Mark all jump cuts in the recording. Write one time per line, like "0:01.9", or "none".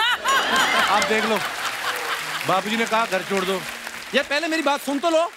none

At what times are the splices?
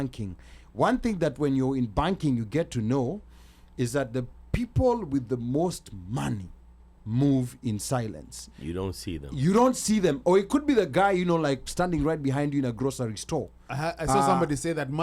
none

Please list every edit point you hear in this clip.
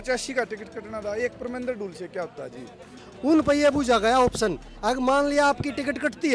0:03.0

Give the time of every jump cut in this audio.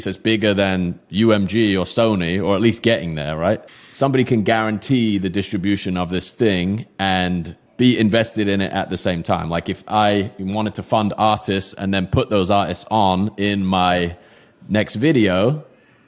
0:03.7
0:07.6

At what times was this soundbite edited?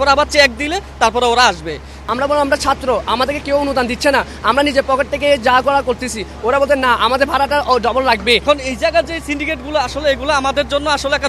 0:01.9
0:08.4

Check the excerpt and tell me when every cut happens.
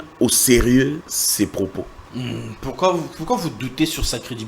0:01.2
0:02.0

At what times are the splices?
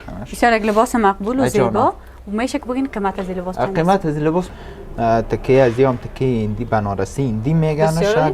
0:04.6

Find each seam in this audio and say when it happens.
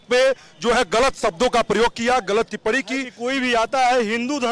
0:03.1

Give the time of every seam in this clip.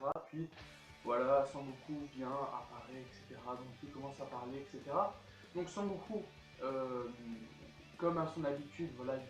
none

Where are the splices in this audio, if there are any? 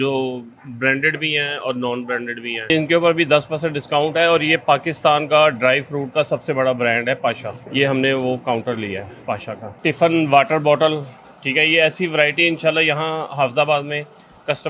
0:02.7
0:09.7

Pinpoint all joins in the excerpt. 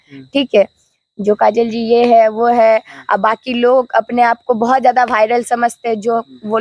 none

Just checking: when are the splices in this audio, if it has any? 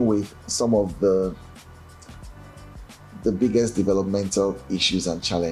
none

